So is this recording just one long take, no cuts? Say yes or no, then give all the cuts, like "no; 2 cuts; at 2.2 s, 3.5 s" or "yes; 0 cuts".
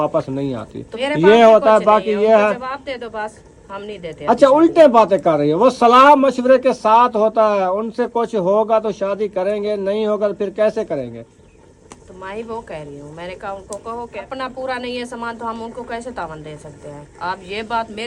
no; 2 cuts; at 14.3 s, 17.0 s